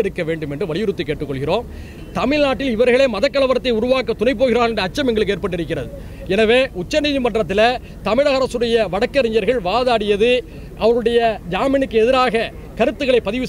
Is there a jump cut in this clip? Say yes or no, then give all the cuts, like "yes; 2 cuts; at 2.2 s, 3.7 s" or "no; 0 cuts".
yes; 1 cut; at 1.9 s